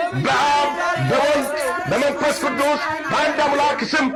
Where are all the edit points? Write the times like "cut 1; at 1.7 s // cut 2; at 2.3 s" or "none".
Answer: none